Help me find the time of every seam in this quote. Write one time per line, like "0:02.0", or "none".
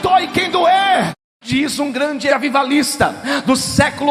0:01.1
0:02.3